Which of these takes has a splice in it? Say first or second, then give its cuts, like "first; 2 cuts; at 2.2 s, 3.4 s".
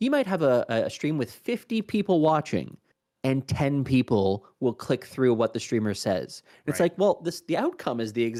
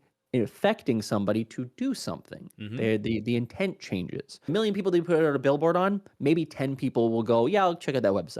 second; 1 cut; at 4.5 s